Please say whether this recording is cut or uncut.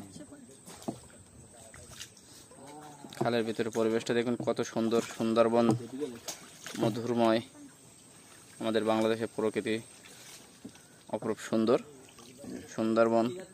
uncut